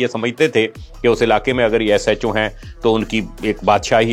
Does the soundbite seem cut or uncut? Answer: uncut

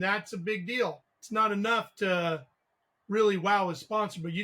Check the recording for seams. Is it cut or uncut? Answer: cut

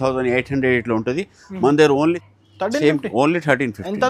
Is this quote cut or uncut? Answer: cut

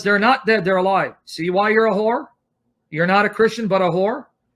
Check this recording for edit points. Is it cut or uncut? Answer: cut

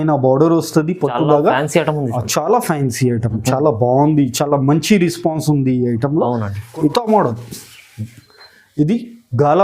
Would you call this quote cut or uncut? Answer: cut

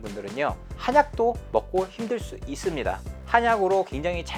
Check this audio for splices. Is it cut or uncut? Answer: uncut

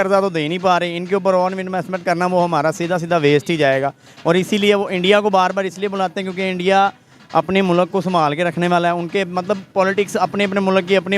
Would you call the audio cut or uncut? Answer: uncut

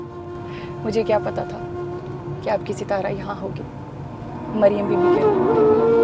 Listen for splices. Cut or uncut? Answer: uncut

